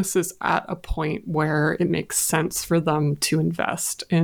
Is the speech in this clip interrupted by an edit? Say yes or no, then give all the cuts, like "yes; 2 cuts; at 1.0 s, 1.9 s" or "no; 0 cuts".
no; 0 cuts